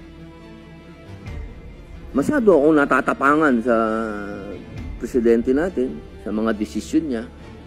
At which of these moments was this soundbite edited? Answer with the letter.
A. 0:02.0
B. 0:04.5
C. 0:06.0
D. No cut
D